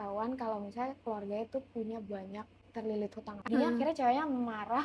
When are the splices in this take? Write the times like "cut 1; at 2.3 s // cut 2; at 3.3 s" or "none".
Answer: cut 1; at 3.5 s

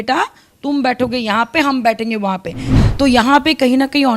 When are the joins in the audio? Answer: cut 1; at 2.7 s

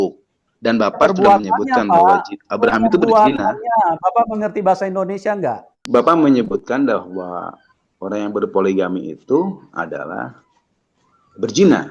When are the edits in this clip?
cut 1; at 5.7 s

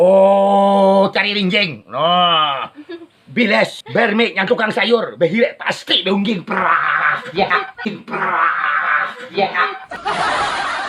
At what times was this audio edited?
cut 1; at 9.9 s

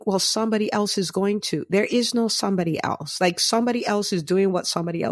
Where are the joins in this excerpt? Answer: none

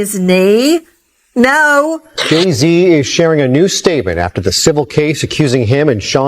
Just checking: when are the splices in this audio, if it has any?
cut 1; at 2.1 s

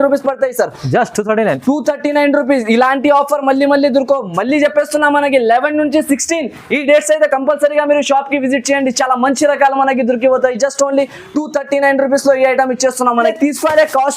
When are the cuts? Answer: cut 1; at 13.2 s

